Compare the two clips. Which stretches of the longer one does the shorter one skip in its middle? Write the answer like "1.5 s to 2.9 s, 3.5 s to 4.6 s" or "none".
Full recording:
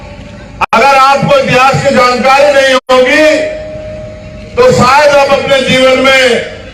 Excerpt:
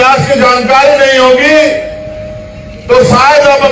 2.8 s to 2.9 s